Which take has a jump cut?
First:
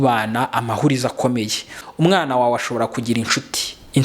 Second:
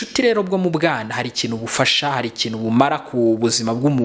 first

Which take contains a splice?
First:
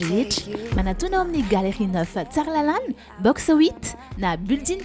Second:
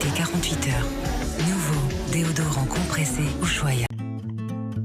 second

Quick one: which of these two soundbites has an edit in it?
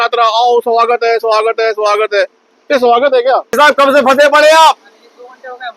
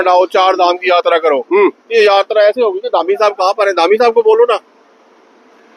first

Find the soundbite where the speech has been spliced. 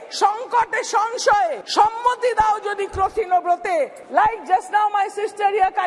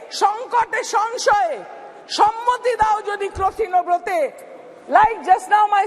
first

